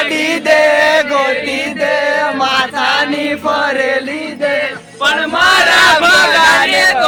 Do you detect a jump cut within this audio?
no; 0 cuts

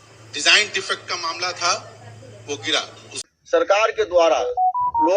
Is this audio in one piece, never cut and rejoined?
no; 1 cut; at 3.3 s

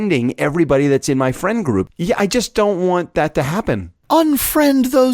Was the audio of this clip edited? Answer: yes; 2 cuts; at 1.9 s, 3.9 s

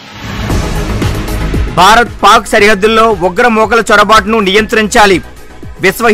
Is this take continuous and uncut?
no; 1 cut; at 1.6 s

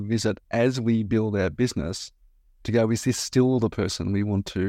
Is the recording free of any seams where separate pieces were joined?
yes; 0 cuts

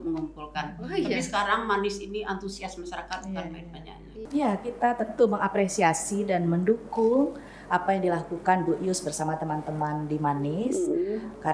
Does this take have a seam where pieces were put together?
yes; 1 cut; at 4.2 s

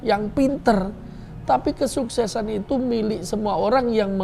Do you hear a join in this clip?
no; 0 cuts

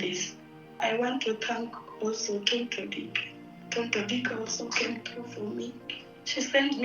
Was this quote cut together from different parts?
yes; 2 cuts; at 0.8 s, 5.9 s

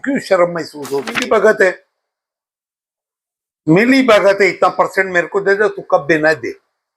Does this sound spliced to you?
yes; 1 cut; at 1.2 s

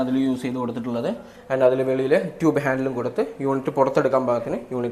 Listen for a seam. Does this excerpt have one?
no; 0 cuts

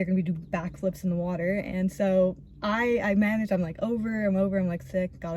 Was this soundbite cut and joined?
no; 0 cuts

